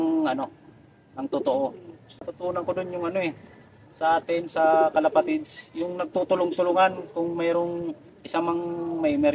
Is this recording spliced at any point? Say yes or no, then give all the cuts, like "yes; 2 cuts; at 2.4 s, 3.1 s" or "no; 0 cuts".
no; 0 cuts